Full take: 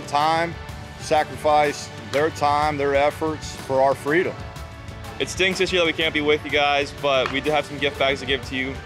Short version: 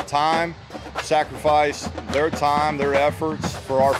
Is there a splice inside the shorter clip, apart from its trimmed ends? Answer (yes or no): no